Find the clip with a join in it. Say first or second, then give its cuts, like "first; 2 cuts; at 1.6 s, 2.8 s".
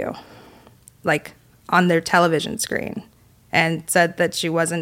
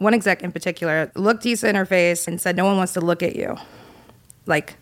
second; 2 cuts; at 1.1 s, 2.3 s